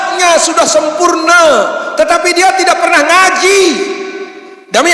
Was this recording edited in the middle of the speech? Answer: no; 0 cuts

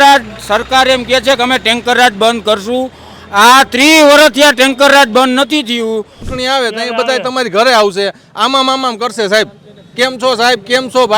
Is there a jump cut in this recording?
yes; 1 cut; at 6.2 s

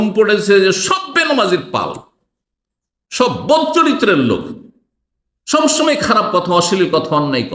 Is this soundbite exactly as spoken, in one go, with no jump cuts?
yes; 0 cuts

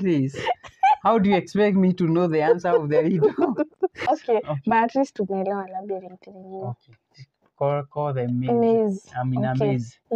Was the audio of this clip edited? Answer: yes; 1 cut; at 4.0 s

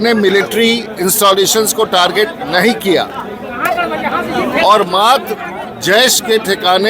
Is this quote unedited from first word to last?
yes; 0 cuts

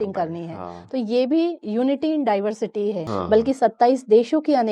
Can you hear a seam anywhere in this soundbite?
yes; 1 cut; at 3.1 s

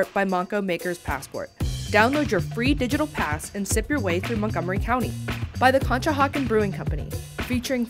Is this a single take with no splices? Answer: yes; 0 cuts

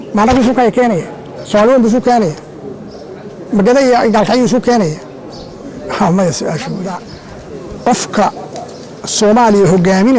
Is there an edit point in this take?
yes; 1 cut; at 7.1 s

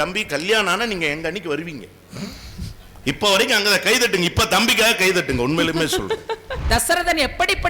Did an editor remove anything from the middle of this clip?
yes; 1 cut; at 6.5 s

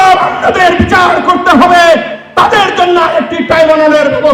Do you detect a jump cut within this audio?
no; 0 cuts

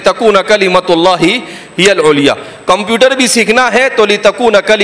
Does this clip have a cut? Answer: no; 0 cuts

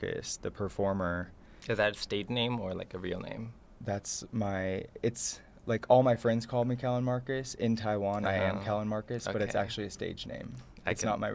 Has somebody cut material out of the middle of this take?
no; 0 cuts

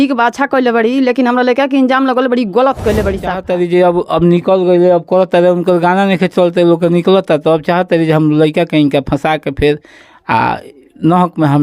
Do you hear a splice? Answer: yes; 1 cut; at 3.4 s

